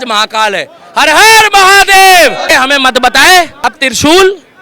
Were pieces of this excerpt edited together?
yes; 2 cuts; at 2.5 s, 3.8 s

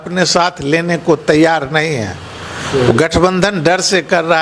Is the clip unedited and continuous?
yes; 0 cuts

